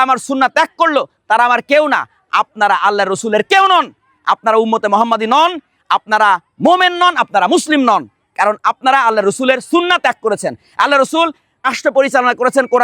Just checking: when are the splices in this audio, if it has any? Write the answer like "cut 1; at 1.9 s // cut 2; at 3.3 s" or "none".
cut 1; at 11.7 s